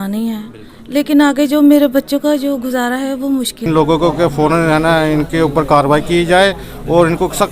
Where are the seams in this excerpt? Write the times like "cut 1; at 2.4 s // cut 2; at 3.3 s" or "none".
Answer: cut 1; at 3.7 s